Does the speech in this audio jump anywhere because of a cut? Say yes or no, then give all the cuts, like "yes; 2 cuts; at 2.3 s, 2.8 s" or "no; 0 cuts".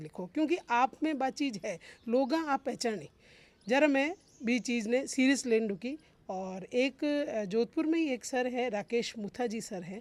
no; 0 cuts